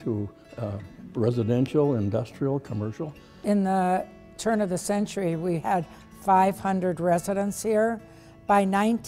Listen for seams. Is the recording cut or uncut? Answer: uncut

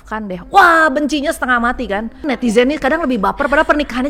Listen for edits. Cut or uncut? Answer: cut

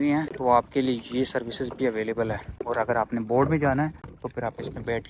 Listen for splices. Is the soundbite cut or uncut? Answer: uncut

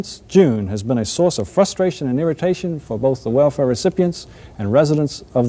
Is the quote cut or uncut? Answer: cut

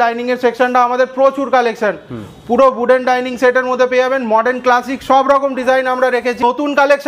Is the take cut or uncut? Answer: uncut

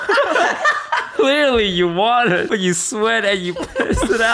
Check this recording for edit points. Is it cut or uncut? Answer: cut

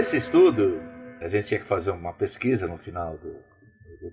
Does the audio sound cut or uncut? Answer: cut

